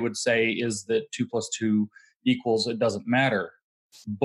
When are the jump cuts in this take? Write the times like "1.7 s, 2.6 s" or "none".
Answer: none